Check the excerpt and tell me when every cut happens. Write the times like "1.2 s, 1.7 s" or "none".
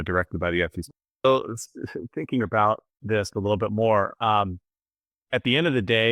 0.9 s